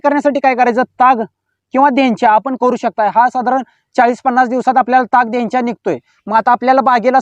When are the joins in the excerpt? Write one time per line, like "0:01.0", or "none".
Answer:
none